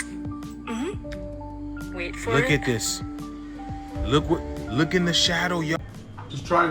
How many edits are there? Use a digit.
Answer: 1